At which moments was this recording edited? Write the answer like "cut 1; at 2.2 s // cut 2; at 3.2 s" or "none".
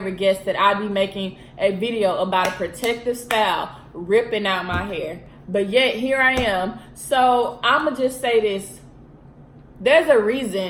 none